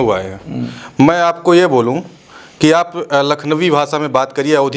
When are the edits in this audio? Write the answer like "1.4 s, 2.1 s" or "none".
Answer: none